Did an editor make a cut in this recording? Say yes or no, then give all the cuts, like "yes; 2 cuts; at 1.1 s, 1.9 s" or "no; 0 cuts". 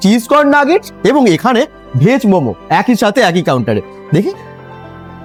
no; 0 cuts